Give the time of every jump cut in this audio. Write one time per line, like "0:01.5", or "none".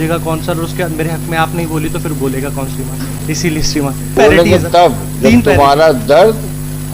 0:04.2